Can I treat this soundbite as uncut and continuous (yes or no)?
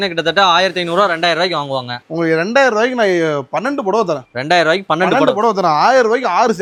yes